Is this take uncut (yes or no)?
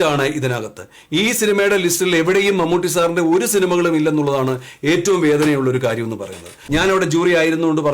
no